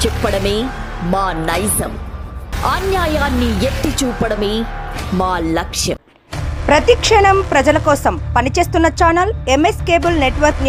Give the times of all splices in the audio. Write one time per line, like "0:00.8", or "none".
none